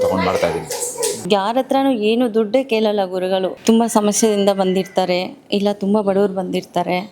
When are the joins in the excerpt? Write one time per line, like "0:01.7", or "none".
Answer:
0:01.2
0:03.5